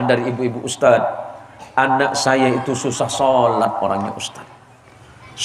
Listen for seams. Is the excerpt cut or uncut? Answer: uncut